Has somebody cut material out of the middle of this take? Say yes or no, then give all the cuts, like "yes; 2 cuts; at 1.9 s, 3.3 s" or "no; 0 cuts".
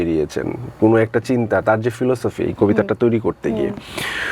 no; 0 cuts